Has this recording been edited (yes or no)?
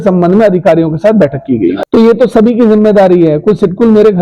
yes